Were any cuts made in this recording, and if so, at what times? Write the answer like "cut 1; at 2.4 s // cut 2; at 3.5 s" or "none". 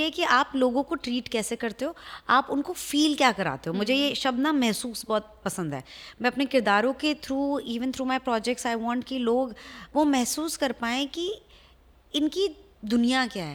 none